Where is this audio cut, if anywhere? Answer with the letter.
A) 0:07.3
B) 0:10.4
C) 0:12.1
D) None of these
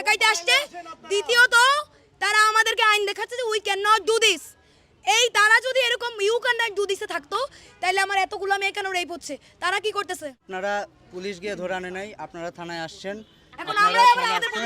B